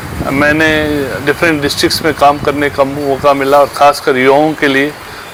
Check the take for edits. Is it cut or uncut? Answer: uncut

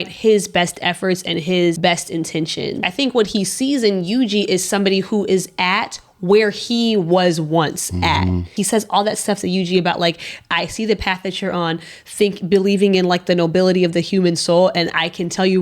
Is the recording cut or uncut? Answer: cut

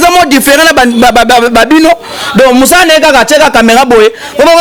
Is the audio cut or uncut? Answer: uncut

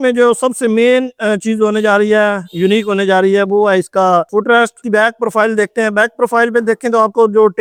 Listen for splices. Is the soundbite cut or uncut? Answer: uncut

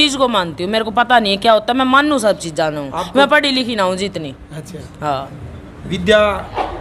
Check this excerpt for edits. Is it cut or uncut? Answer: uncut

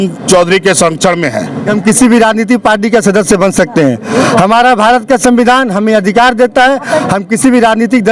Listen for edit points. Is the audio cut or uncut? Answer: cut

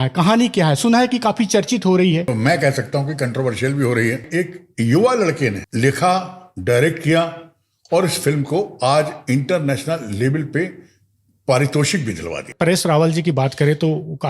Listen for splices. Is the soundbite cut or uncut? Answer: cut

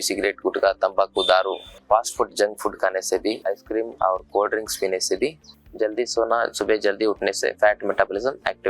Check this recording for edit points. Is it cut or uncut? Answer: cut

